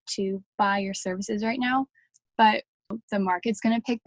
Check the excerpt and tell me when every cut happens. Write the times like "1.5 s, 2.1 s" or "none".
2.9 s